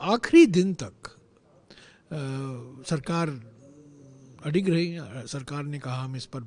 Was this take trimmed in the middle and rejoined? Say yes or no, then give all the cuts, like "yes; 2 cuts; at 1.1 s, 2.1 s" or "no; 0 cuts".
no; 0 cuts